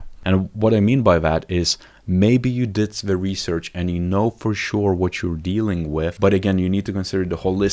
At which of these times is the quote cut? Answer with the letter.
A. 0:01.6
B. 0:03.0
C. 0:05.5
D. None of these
D